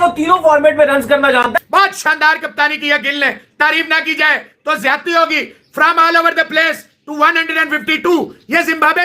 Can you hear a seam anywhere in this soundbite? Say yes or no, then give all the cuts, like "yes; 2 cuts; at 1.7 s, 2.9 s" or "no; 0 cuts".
yes; 1 cut; at 1.6 s